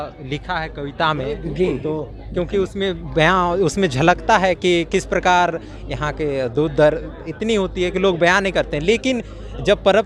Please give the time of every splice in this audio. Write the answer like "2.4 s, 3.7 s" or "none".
none